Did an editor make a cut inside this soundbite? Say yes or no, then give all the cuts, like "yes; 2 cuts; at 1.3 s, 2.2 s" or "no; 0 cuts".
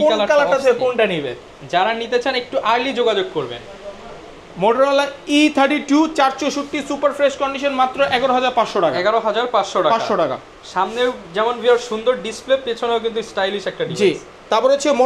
no; 0 cuts